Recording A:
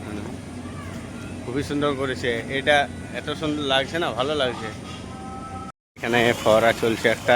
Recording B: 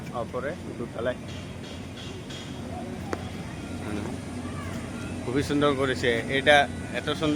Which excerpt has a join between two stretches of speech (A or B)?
A